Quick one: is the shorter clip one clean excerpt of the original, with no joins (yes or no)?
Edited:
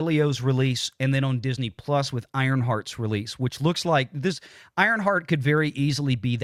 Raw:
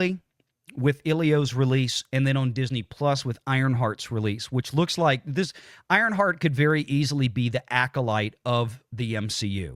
yes